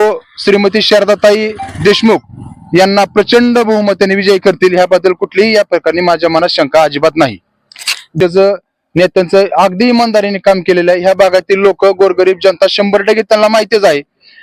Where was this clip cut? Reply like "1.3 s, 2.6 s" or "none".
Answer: 8.1 s